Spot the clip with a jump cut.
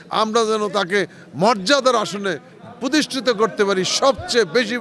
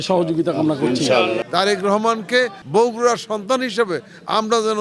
second; 2 cuts; at 1.4 s, 2.6 s

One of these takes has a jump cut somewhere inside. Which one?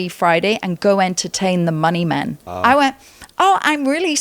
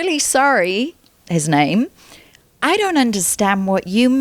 first; 1 cut; at 2.4 s

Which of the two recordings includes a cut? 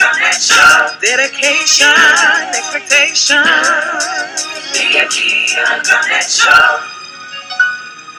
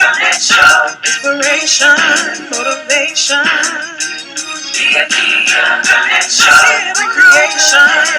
second; 1 cut; at 1.0 s

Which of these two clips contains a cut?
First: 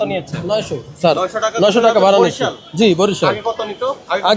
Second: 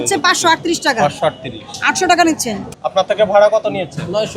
second; 1 cut; at 2.7 s

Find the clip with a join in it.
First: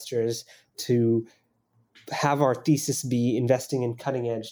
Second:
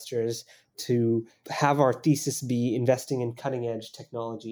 second; 1 cut; at 1.4 s

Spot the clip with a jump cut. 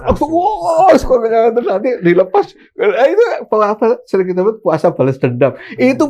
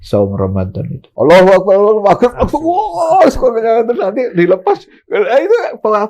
second; 1 cut; at 1.0 s

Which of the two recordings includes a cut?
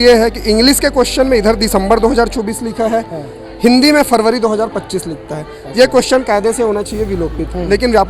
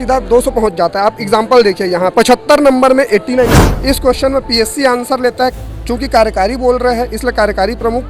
second; 2 cuts; at 2.1 s, 3.6 s

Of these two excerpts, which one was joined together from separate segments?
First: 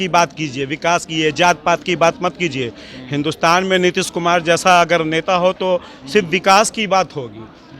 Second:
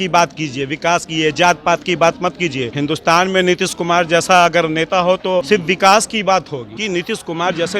second; 3 cuts; at 2.7 s, 5.5 s, 6.7 s

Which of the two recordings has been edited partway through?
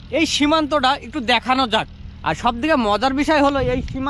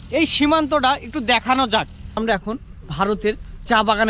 second; 1 cut; at 2.0 s

